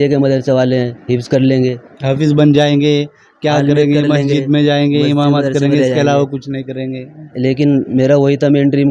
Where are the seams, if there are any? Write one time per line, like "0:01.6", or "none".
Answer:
none